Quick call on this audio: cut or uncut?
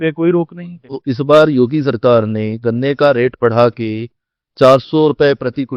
cut